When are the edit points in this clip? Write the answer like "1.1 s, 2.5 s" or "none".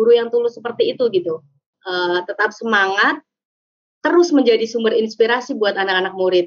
1.7 s